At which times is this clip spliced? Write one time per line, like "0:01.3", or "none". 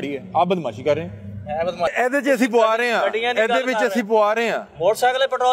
0:01.9